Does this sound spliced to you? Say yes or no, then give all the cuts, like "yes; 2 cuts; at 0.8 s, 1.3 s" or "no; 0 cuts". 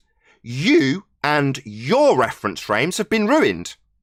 no; 0 cuts